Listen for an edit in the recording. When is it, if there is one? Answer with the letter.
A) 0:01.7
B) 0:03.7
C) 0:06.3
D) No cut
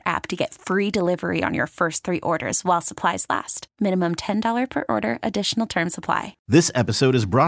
C